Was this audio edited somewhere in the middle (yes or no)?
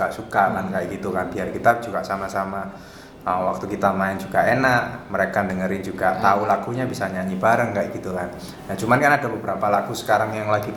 no